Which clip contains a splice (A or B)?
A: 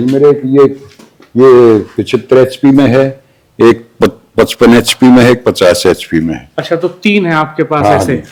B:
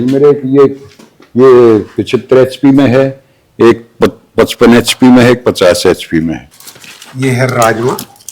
B